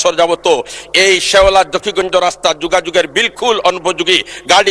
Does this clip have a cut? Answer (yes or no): no